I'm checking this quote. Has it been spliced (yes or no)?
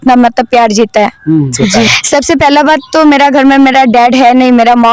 yes